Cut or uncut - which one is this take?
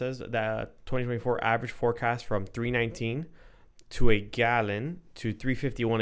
uncut